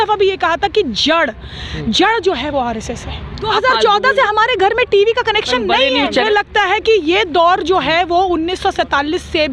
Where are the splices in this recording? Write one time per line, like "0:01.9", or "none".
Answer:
0:03.3
0:06.2